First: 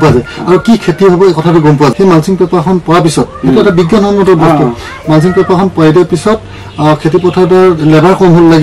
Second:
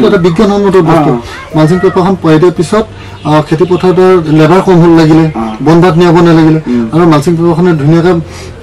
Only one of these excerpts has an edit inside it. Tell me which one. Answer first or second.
first